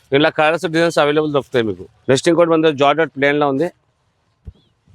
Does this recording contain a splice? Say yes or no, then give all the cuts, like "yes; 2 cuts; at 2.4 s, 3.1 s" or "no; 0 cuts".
yes; 1 cut; at 1.9 s